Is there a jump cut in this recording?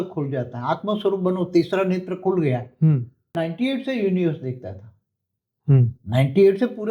yes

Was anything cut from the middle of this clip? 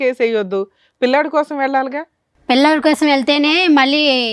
no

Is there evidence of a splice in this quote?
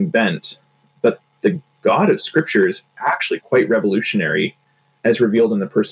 no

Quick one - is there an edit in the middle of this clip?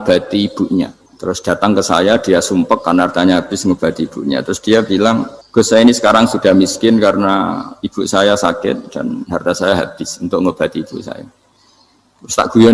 yes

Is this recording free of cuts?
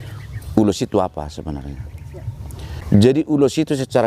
no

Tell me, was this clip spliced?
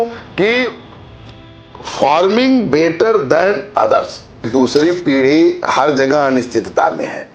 yes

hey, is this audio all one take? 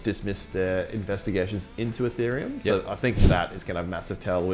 yes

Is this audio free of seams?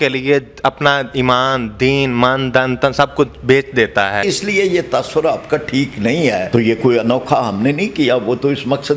no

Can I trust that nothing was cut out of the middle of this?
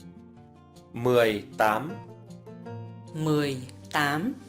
no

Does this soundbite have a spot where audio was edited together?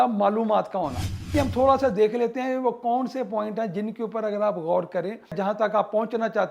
yes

